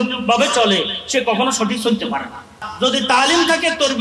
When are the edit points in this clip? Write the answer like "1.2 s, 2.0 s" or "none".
2.7 s